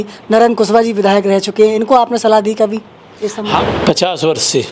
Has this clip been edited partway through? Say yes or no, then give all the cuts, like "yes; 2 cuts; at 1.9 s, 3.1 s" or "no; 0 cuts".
yes; 1 cut; at 3.6 s